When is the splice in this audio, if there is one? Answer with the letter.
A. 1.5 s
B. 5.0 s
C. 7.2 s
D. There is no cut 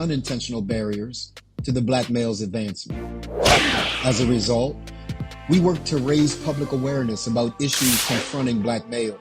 C